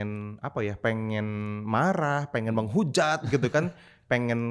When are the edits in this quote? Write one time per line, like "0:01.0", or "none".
none